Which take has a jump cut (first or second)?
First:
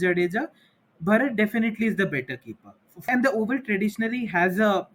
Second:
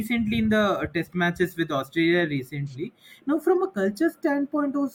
first